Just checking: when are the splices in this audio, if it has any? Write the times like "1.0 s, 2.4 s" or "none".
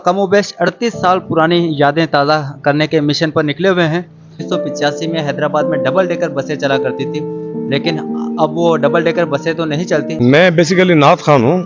4.4 s, 10.1 s